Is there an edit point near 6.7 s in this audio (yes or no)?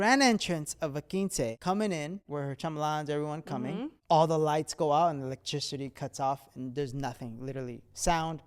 no